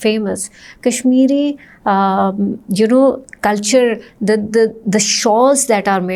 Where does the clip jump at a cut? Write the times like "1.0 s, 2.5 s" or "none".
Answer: none